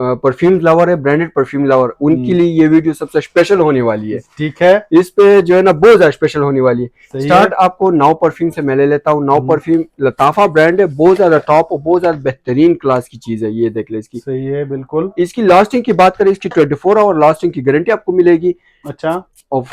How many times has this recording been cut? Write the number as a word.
zero